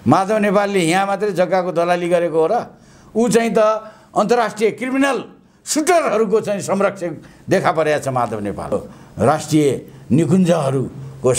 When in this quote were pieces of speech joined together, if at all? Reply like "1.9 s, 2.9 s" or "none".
8.7 s